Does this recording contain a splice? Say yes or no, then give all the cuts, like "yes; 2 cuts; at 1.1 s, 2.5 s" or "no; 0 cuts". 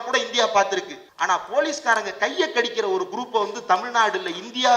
yes; 1 cut; at 1.0 s